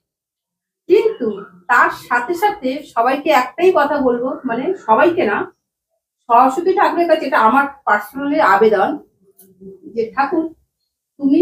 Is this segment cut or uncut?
uncut